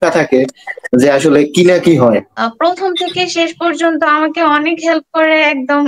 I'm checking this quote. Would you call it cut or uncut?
cut